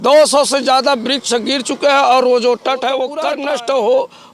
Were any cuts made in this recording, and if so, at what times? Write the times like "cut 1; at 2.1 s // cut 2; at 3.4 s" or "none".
cut 1; at 3.2 s